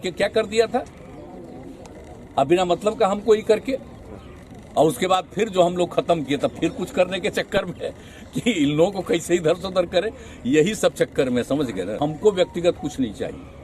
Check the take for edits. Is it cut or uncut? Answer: cut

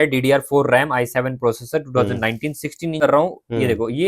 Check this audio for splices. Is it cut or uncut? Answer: cut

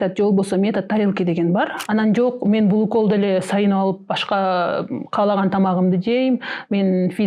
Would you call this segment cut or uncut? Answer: cut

